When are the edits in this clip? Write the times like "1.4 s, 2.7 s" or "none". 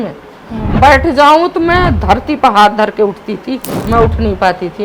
3.7 s